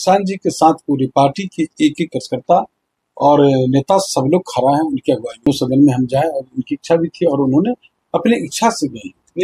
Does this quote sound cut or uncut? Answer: cut